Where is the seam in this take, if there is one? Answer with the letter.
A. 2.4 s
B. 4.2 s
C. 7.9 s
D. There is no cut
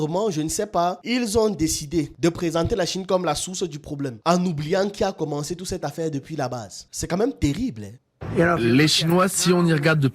C